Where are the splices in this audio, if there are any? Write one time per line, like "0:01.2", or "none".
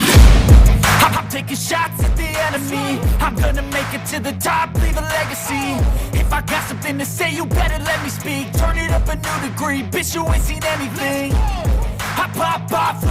0:01.1